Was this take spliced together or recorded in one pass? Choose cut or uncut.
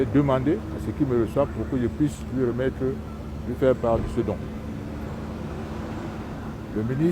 uncut